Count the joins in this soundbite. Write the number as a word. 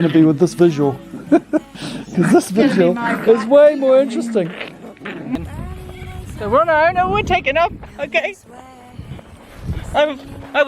one